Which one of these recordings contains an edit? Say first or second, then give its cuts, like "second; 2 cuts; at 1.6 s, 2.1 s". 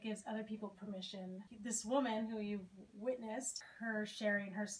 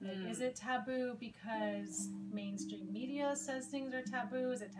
first; 2 cuts; at 1.5 s, 3.7 s